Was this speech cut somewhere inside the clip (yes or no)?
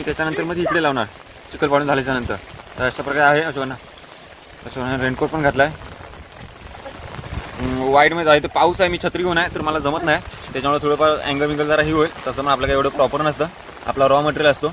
no